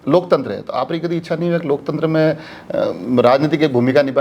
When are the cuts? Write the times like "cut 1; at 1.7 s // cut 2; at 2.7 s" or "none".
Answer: none